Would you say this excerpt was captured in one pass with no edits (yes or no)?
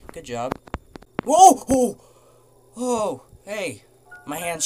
no